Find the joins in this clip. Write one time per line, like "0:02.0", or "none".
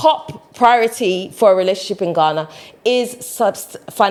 none

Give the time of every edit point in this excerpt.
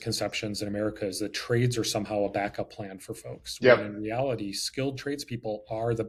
none

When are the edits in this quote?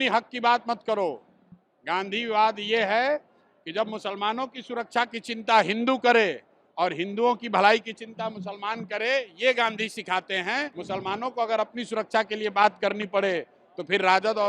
0:10.8

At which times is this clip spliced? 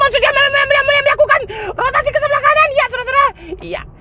none

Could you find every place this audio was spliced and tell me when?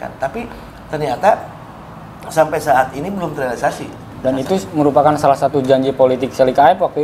0:04.1

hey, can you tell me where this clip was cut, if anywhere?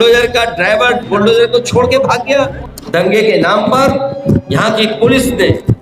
0:02.6

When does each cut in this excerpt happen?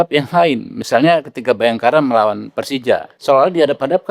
0:03.1

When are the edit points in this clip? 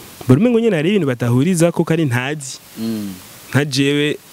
none

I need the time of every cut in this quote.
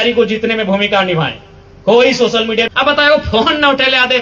0:02.7

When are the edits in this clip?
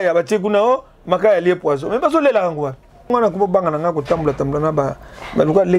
0:03.1

